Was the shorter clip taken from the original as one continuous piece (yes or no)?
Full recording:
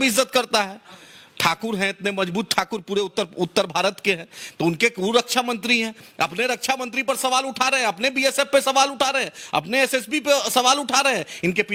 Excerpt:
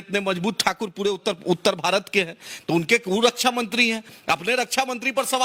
yes